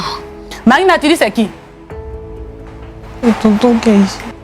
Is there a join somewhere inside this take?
no; 0 cuts

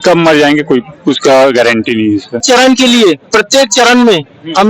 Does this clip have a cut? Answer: yes; 1 cut; at 2.4 s

